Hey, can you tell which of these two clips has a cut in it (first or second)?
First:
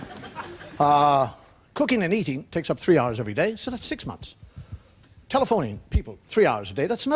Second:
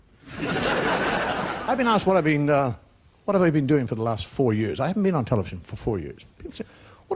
second